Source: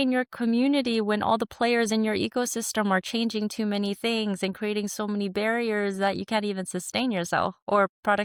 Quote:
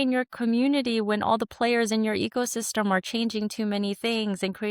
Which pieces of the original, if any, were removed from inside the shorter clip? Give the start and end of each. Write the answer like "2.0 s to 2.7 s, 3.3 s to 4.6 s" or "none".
none